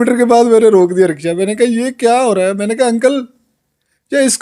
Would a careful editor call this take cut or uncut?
uncut